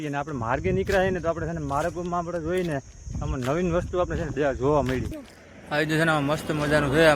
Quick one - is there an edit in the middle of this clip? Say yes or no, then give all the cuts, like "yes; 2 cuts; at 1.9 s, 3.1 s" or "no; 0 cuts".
yes; 1 cut; at 5.2 s